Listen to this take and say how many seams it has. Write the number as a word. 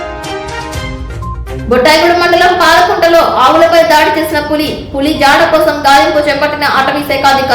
one